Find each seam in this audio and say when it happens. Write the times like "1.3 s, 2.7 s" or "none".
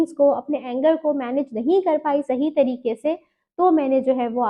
none